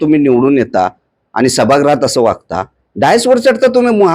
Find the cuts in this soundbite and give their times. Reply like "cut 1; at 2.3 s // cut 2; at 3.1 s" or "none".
none